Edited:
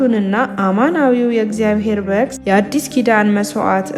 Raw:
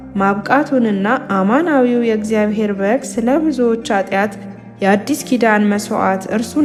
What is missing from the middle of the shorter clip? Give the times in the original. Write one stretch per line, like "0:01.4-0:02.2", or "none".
0:03.1-0:04.7